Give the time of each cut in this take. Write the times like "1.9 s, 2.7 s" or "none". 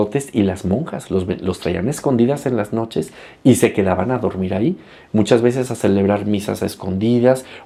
none